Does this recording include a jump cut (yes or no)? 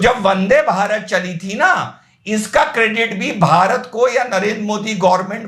no